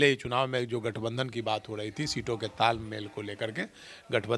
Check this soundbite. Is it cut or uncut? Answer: uncut